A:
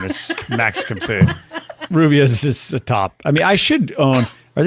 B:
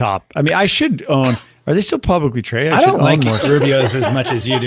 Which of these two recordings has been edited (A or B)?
A